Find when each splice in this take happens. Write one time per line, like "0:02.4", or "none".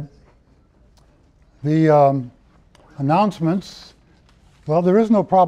none